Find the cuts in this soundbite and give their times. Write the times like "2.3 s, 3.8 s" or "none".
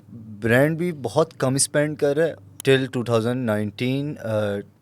2.5 s